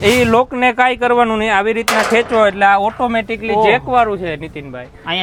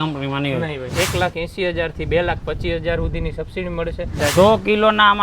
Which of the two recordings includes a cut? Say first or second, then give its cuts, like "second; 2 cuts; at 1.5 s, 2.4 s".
second; 2 cuts; at 0.9 s, 4.2 s